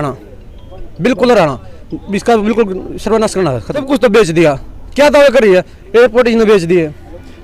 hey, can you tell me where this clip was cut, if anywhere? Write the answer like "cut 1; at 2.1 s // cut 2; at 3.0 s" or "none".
cut 1; at 3.7 s